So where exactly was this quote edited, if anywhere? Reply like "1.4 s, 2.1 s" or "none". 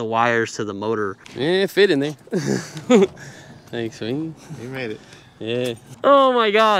1.2 s, 5.9 s